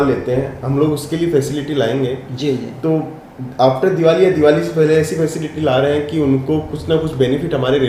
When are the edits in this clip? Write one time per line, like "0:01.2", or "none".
none